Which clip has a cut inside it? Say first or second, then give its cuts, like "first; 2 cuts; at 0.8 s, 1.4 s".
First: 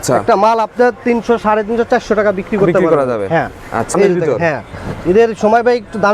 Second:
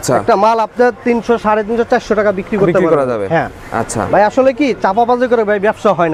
first; 1 cut; at 3.9 s